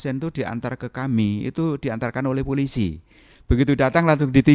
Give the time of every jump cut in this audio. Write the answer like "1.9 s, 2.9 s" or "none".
none